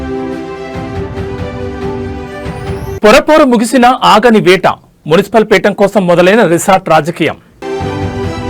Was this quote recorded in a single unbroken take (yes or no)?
no